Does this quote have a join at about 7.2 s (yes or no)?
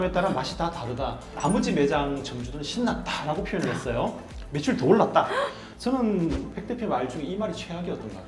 no